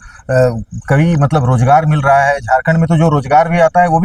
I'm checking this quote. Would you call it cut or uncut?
uncut